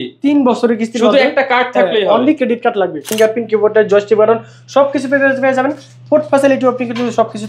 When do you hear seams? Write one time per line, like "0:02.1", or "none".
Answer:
0:03.1